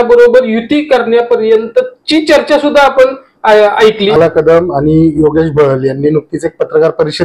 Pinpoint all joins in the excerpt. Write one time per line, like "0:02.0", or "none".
0:04.2